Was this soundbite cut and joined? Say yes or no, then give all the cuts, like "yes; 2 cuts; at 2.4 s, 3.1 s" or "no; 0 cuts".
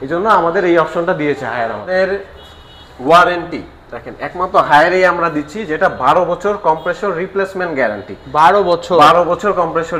yes; 1 cut; at 1.9 s